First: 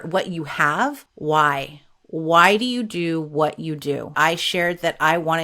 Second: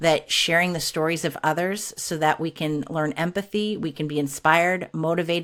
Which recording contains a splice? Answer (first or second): first